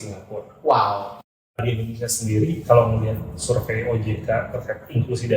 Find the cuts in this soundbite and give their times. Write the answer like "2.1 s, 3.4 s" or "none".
1.7 s